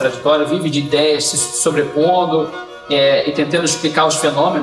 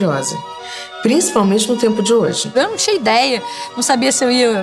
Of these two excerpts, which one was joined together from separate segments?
second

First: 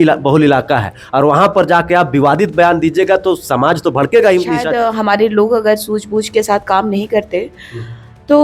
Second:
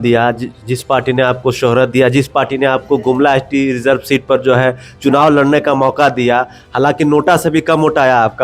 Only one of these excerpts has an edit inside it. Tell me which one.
first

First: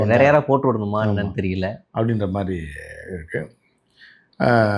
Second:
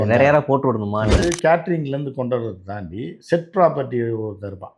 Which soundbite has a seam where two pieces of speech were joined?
second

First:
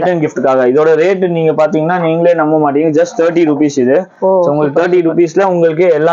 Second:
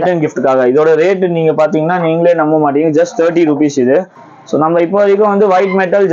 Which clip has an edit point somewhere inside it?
second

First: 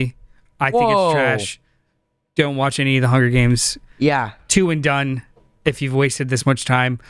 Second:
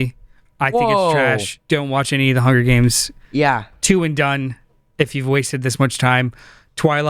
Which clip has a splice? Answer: second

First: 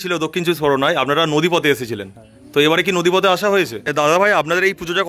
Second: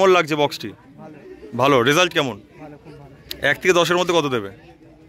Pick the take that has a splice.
first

